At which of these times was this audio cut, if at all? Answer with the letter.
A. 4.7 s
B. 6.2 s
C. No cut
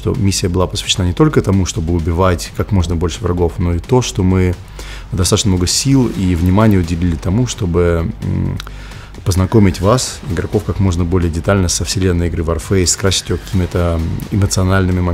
C